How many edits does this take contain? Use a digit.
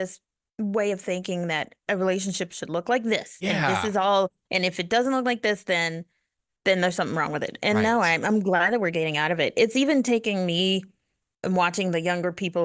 0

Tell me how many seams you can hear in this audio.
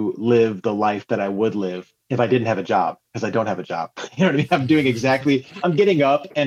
0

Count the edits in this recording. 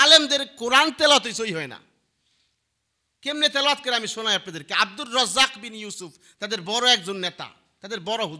0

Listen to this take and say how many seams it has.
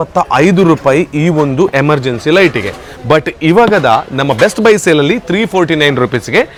0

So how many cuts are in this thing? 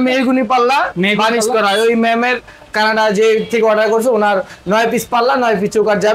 0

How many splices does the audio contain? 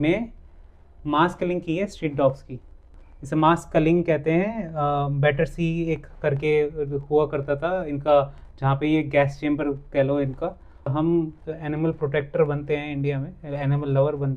1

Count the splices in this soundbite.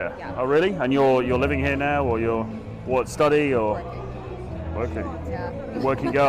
1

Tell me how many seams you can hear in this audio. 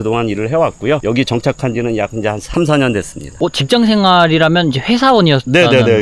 1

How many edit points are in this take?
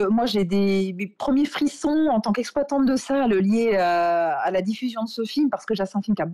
0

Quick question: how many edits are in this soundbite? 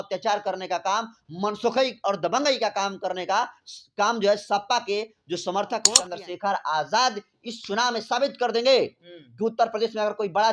1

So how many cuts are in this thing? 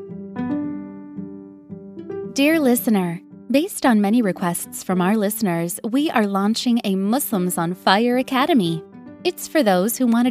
1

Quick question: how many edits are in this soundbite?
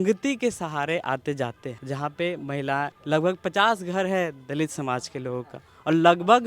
2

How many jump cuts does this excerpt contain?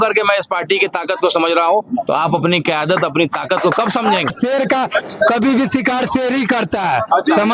1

